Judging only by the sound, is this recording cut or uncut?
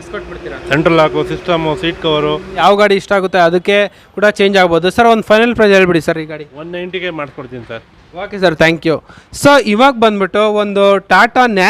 cut